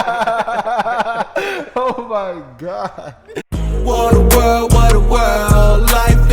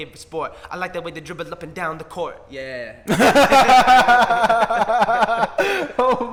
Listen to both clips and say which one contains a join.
first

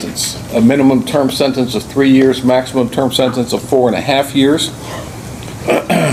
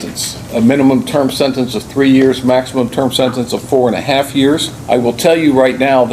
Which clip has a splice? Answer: second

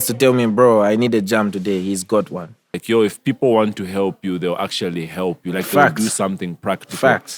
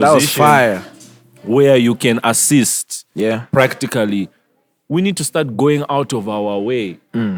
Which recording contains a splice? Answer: first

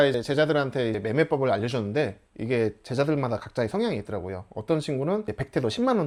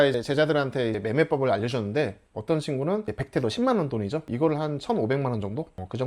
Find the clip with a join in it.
second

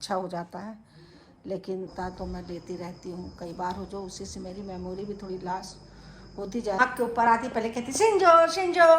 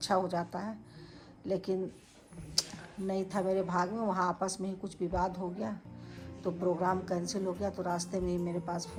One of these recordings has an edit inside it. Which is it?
first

